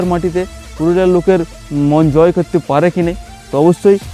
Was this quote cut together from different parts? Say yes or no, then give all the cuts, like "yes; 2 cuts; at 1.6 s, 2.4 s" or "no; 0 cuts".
no; 0 cuts